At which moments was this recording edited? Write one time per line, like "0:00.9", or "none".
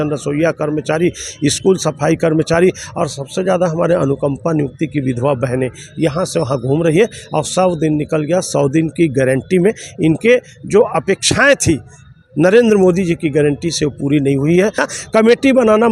0:14.9